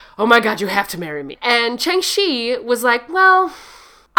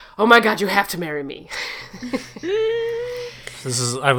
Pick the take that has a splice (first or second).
first